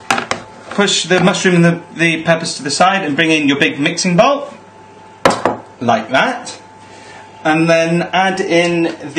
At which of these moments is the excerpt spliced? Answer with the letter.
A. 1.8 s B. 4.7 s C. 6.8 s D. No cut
D